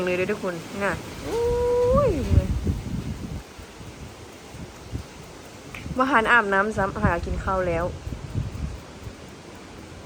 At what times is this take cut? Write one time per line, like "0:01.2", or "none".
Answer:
none